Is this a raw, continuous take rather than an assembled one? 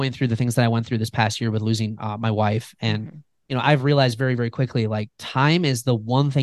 yes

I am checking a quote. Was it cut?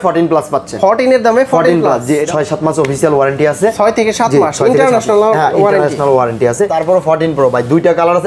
yes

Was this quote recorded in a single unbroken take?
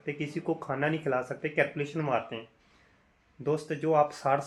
yes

